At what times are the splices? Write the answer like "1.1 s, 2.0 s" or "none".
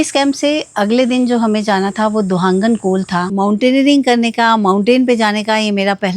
3.3 s